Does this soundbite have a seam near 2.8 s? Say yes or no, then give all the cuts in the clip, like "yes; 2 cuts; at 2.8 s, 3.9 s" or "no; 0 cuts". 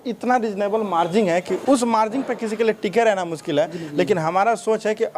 no; 1 cut; at 1.5 s